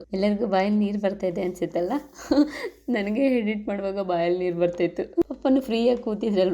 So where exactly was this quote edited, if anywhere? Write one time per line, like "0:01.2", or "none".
0:05.2